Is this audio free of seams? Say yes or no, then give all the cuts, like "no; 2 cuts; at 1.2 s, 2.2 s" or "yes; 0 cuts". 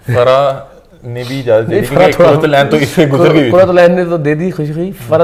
yes; 0 cuts